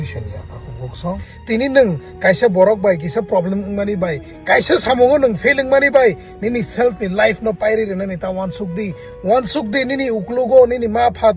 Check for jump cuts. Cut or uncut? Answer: cut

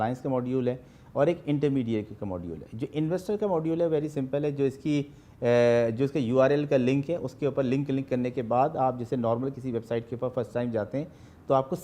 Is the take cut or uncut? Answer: uncut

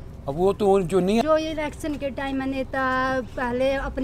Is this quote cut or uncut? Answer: cut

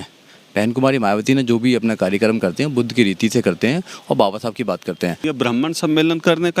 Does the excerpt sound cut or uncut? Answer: cut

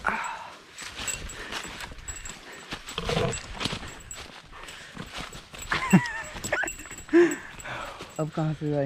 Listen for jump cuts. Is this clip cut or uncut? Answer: uncut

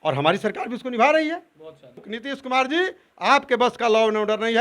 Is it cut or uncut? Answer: cut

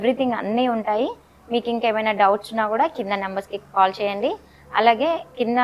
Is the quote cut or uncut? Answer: uncut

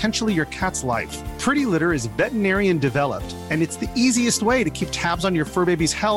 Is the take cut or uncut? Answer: uncut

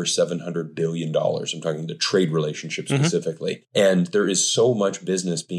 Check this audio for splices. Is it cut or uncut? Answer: uncut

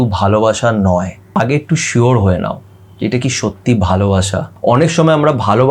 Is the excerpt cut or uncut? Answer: cut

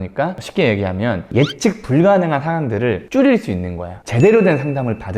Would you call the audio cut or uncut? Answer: cut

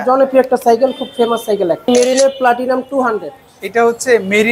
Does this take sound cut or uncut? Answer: cut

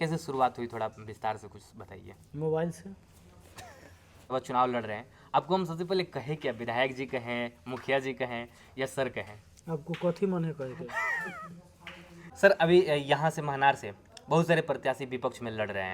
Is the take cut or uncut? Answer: cut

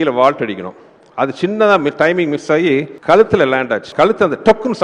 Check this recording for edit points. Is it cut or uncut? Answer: cut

